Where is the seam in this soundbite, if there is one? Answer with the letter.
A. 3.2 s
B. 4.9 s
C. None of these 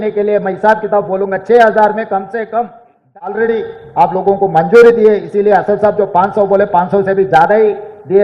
A